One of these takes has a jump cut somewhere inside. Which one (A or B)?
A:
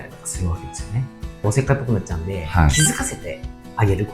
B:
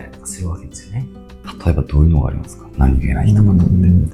A